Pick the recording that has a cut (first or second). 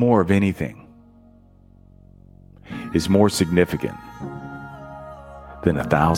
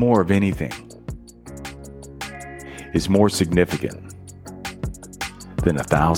second